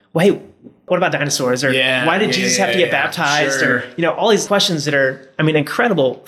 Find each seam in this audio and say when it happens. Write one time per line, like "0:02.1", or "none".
0:00.8
0:04.4